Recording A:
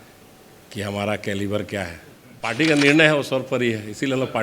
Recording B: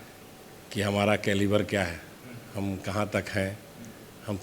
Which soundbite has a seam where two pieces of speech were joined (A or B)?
A